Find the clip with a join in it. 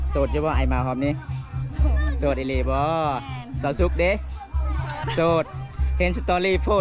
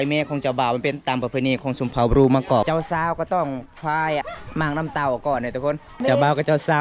second; 3 cuts; at 2.6 s, 4.3 s, 5.9 s

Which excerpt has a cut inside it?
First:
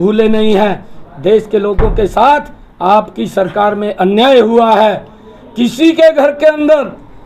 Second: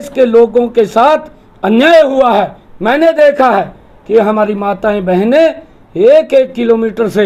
first; 1 cut; at 1.4 s

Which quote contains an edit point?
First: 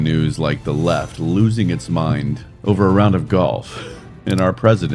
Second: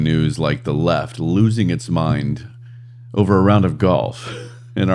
first; 1 cut; at 2.4 s

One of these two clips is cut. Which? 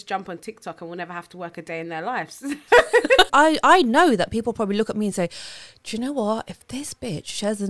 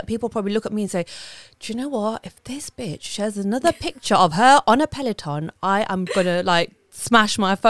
first; 1 cut; at 3.3 s

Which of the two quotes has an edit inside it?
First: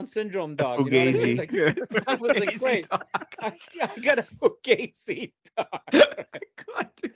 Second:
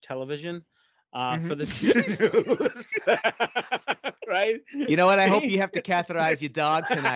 first; 1 cut; at 4.3 s

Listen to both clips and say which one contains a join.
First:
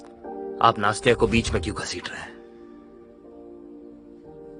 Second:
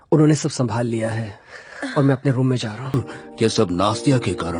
second; 1 cut; at 2.9 s

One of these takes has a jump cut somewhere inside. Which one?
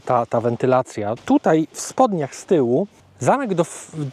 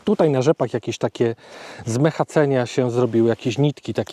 first; 2 cuts; at 1.1 s, 3.0 s

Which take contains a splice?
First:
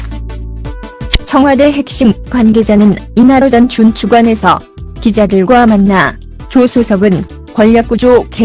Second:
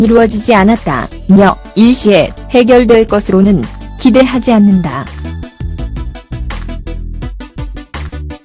first; 1 cut; at 2.2 s

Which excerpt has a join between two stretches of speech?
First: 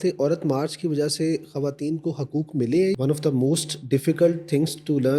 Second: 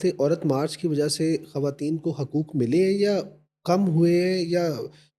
first; 1 cut; at 3.0 s

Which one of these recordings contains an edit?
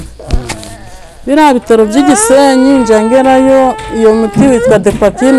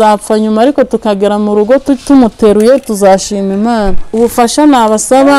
second; 1 cut; at 4.0 s

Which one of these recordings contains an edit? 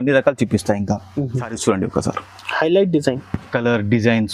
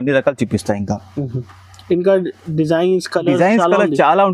first; 1 cut; at 1.5 s

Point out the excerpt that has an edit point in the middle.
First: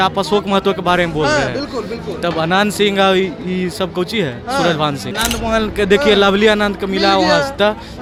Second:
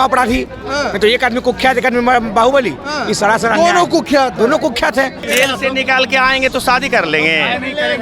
second; 1 cut; at 5.2 s

